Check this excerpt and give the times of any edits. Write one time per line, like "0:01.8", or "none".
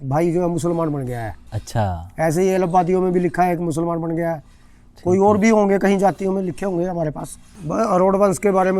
0:07.5